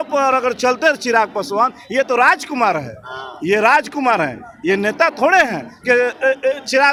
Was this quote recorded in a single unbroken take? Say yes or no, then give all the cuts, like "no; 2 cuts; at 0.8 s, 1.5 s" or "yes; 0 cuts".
yes; 0 cuts